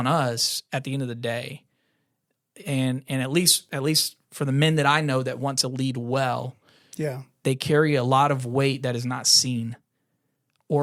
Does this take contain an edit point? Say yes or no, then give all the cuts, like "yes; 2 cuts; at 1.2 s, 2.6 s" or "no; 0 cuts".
no; 0 cuts